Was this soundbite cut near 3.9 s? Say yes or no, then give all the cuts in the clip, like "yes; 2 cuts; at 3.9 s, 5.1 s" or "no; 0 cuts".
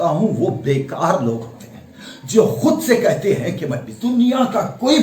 yes; 1 cut; at 3.9 s